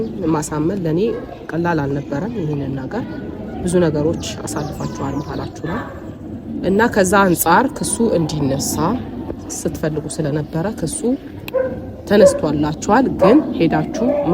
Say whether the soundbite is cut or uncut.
uncut